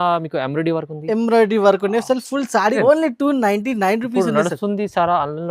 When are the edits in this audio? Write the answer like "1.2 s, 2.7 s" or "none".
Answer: 2.8 s